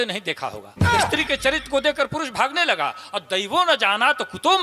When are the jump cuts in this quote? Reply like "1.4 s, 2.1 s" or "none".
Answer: 1.0 s